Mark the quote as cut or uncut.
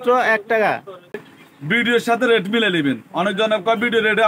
cut